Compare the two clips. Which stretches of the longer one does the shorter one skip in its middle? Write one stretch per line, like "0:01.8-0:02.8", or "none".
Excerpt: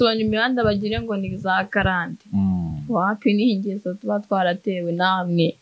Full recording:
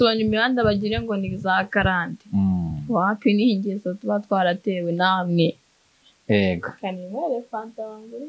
none